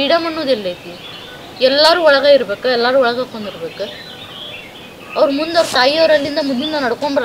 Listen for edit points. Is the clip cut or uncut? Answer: uncut